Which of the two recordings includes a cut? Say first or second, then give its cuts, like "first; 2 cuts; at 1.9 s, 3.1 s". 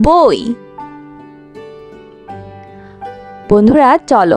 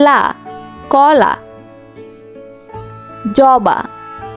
second; 2 cuts; at 1.7 s, 3.2 s